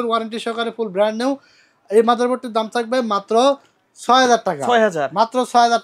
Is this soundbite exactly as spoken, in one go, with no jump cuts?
yes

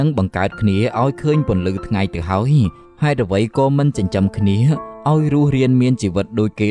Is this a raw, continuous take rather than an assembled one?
yes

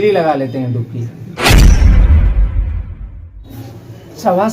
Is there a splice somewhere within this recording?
yes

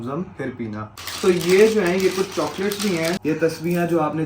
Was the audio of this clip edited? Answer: yes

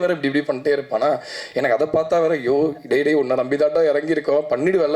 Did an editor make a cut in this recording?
no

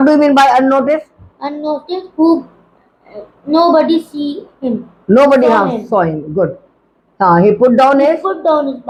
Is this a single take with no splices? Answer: yes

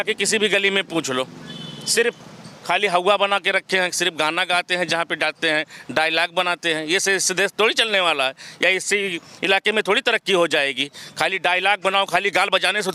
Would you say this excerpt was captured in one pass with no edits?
yes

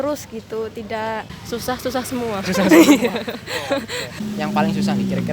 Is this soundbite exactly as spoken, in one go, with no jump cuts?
no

